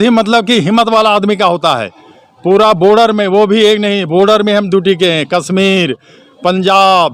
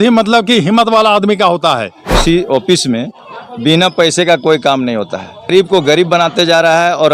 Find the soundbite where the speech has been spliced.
second; 2 cuts; at 2.2 s, 5.5 s

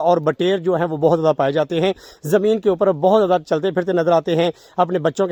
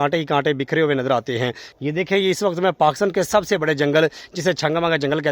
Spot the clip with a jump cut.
second; 1 cut; at 1.8 s

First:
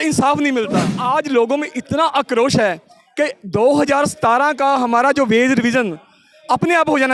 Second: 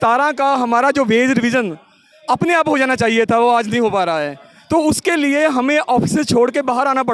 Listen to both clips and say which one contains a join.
first; 1 cut; at 0.9 s

